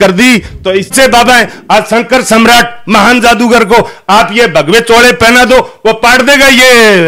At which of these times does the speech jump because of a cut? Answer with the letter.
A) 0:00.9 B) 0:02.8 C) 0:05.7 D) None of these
A